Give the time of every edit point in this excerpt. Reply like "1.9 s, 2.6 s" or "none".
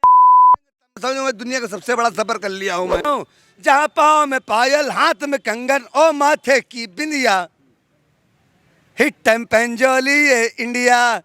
1.0 s, 3.1 s